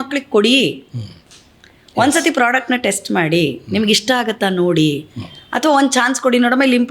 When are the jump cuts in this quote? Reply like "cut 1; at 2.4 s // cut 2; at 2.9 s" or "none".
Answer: none